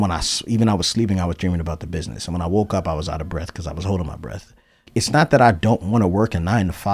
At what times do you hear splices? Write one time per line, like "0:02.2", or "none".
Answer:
0:04.8